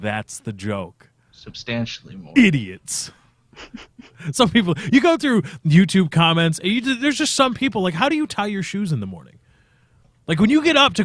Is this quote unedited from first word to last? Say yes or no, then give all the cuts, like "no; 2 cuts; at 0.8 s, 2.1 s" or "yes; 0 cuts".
yes; 0 cuts